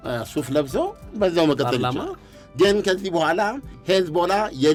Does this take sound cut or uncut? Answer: uncut